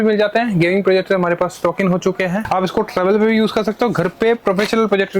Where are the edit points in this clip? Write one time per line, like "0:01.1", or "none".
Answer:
0:02.4

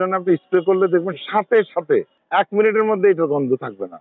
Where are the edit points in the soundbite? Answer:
none

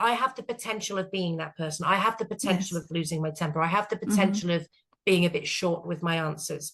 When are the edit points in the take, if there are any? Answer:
none

